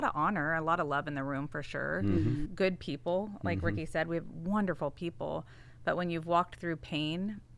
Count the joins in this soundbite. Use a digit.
1